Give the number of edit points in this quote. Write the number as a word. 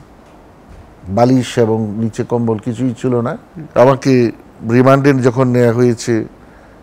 one